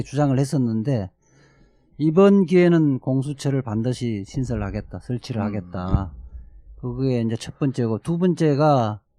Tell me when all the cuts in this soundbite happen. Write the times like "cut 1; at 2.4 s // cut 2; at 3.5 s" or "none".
cut 1; at 1.2 s